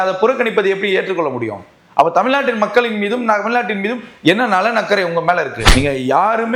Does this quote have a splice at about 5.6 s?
yes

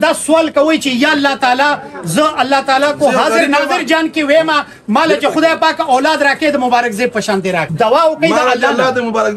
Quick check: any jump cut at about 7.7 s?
yes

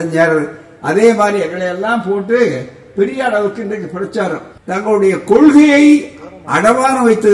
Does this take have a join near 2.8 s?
no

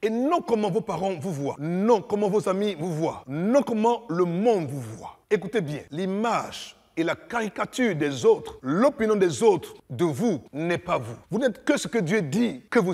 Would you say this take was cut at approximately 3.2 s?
yes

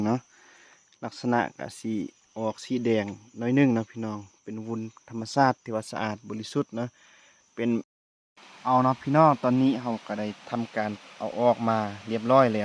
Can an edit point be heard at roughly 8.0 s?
yes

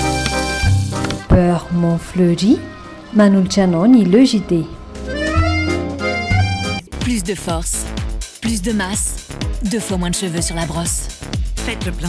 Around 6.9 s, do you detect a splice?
yes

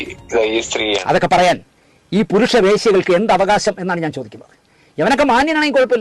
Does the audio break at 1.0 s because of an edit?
yes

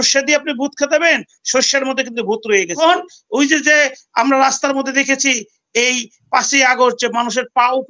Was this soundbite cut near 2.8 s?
yes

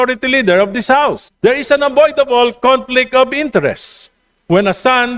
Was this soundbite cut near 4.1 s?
no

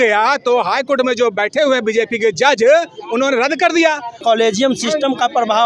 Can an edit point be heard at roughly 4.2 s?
yes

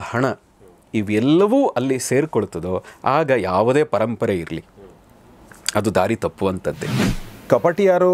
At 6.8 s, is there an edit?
yes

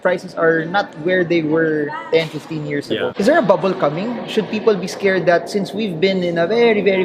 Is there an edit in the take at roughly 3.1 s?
yes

